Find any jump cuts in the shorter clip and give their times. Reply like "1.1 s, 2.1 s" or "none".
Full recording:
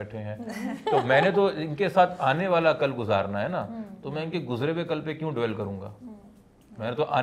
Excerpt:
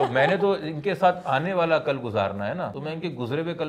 2.8 s